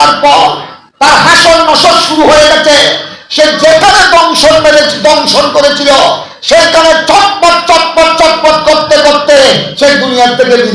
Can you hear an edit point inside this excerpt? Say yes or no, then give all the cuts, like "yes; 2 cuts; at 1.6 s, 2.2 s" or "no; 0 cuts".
no; 0 cuts